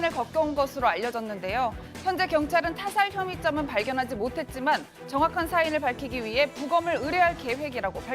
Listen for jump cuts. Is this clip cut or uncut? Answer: cut